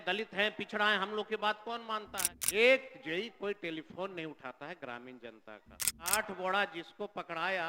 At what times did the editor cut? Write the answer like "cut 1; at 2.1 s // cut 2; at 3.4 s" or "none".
cut 1; at 2.1 s // cut 2; at 6.1 s

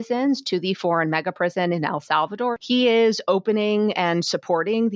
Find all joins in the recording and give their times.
cut 1; at 2.6 s

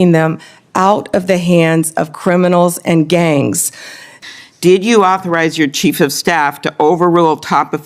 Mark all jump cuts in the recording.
cut 1; at 4.2 s

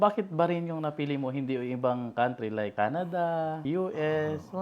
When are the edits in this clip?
cut 1; at 2.7 s // cut 2; at 3.6 s

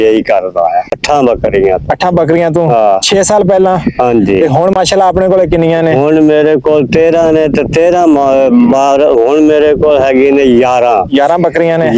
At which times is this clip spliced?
cut 1; at 1.0 s

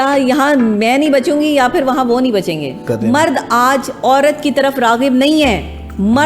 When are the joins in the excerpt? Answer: cut 1; at 2.9 s

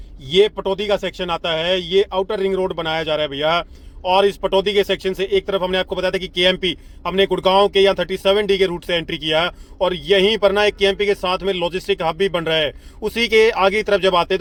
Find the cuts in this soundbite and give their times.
none

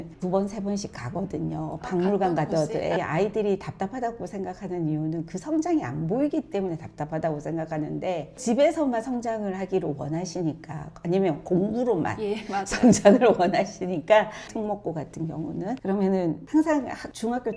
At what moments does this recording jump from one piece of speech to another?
cut 1; at 3.0 s // cut 2; at 8.4 s // cut 3; at 14.4 s

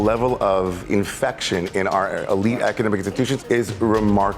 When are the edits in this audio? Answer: cut 1; at 0.8 s // cut 2; at 3.5 s

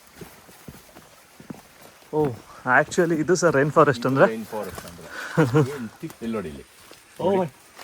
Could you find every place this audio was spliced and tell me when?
cut 1; at 6.2 s

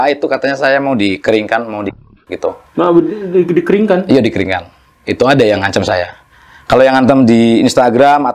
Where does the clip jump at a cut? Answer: none

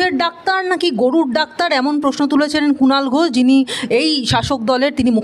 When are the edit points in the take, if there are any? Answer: none

